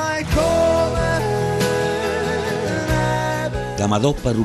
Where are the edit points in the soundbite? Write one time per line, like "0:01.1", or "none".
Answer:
none